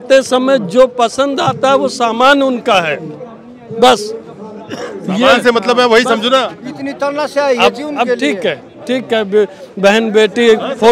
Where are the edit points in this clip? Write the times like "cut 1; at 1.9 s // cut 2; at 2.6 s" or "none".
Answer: none